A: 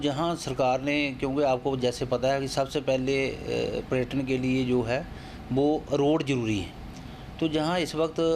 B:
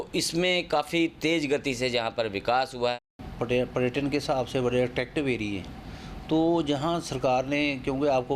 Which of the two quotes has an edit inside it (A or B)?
B